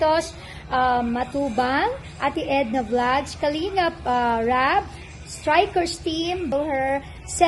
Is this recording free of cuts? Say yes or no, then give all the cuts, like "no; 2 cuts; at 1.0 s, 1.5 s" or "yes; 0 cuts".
no; 1 cut; at 6.5 s